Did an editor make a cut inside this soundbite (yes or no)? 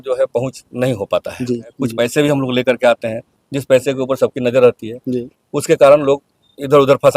yes